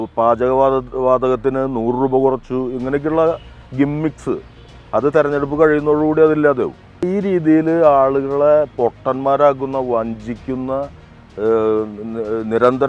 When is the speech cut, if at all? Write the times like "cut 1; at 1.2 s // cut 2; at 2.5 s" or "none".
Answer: cut 1; at 7.1 s